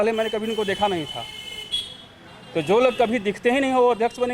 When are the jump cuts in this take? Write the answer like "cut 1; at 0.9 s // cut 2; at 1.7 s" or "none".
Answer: none